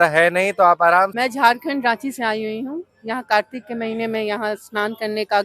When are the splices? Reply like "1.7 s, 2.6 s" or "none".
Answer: 1.1 s